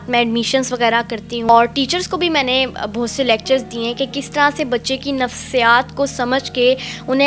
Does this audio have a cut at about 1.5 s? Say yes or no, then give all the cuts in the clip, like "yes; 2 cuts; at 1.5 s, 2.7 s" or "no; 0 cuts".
yes; 1 cut; at 1.5 s